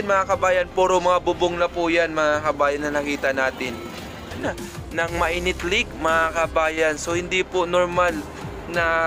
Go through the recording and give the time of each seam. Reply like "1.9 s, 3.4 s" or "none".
4.4 s